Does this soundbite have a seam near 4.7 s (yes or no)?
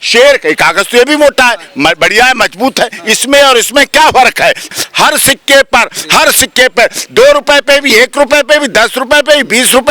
yes